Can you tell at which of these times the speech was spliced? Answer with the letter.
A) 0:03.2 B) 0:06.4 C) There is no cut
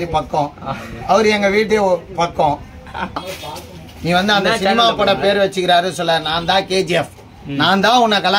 A